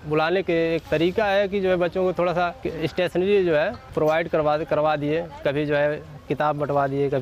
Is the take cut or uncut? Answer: cut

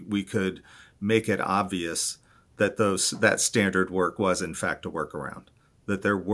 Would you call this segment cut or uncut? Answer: uncut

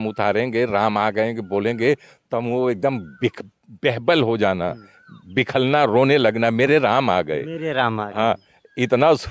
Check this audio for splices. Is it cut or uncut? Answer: uncut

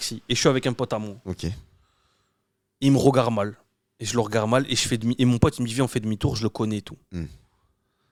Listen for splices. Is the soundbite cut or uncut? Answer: uncut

